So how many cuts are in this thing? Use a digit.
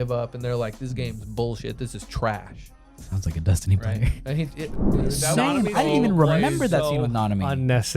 1